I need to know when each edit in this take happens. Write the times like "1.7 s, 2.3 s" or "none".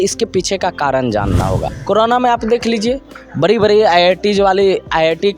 1.7 s